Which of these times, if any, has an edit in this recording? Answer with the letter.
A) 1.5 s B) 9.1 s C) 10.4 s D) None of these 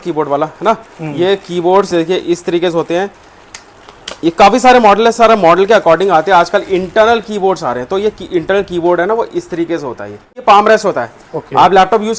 C